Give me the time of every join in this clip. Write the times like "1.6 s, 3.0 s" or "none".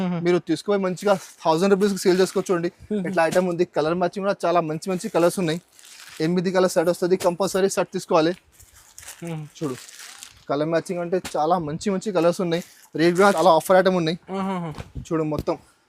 13.4 s